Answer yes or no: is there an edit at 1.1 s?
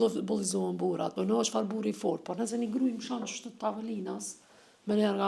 yes